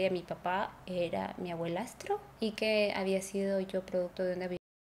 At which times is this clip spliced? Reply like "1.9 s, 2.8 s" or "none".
2.3 s